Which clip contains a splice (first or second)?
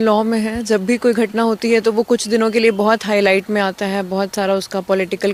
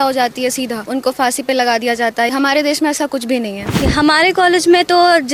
second